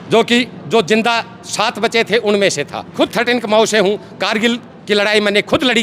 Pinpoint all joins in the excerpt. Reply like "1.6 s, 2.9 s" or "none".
2.9 s

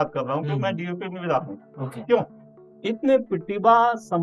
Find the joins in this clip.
2.4 s

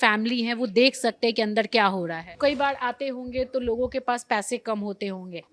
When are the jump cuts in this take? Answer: 2.2 s

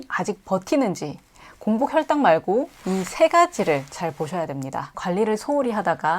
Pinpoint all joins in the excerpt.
5.0 s

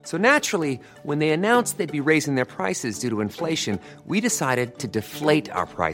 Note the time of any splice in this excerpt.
none

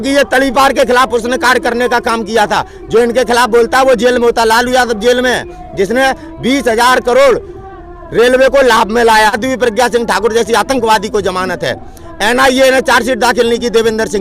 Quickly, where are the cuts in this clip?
9.4 s

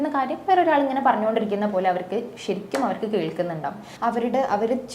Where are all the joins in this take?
3.8 s

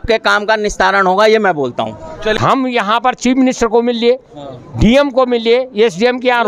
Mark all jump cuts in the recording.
2.4 s

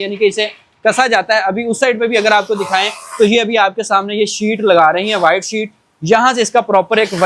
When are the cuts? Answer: none

